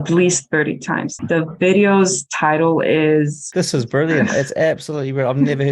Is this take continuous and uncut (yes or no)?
no